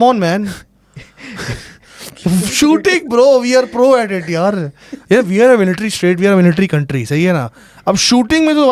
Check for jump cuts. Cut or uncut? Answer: uncut